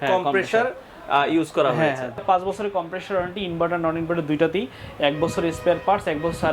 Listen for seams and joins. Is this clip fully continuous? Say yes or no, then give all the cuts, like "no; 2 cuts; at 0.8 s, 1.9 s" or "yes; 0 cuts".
no; 1 cut; at 2.2 s